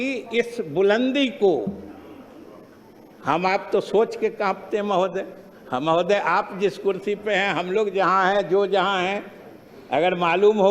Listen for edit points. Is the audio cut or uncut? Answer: uncut